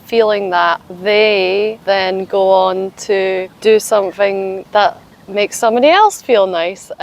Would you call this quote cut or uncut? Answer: cut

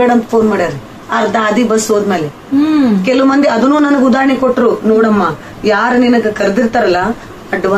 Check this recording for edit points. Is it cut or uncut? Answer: uncut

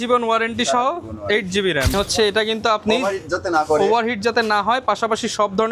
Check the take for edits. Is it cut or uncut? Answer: cut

